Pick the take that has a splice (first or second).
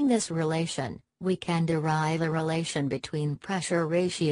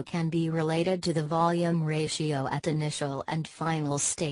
first